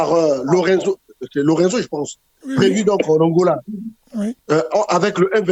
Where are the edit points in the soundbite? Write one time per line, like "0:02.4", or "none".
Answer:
none